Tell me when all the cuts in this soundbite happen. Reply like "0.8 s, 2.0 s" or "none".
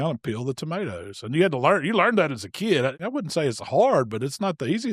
2.9 s